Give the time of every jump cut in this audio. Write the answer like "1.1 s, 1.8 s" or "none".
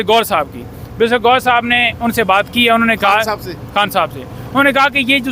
none